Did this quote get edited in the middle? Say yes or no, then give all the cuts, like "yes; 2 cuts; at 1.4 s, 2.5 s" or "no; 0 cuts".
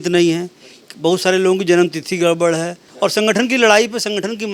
yes; 1 cut; at 2.8 s